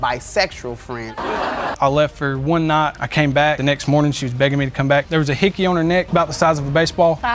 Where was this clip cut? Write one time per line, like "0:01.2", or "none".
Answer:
0:01.7